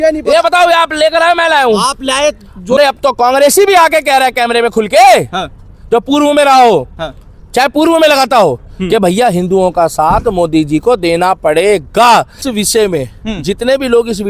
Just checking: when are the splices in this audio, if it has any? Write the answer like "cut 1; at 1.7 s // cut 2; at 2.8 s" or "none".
cut 1; at 2.8 s // cut 2; at 12.4 s